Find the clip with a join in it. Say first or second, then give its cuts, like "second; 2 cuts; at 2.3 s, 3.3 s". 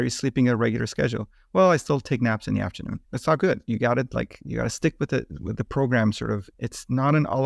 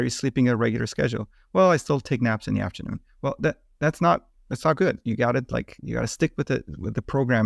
first; 2 cuts; at 3.0 s, 6.5 s